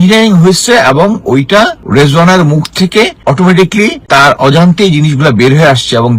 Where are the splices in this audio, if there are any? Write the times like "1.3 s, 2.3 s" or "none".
1.8 s, 3.2 s, 4.0 s